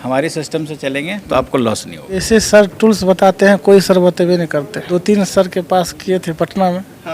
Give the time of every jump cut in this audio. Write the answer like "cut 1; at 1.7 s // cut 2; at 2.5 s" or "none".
cut 1; at 2.1 s // cut 2; at 4.8 s